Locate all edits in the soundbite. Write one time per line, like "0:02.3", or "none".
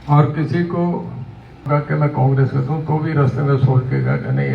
0:01.7